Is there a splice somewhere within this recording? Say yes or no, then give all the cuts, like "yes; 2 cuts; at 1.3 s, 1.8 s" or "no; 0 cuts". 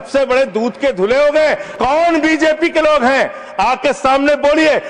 yes; 1 cut; at 1.7 s